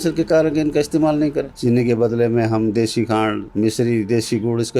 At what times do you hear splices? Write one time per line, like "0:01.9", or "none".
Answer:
0:01.5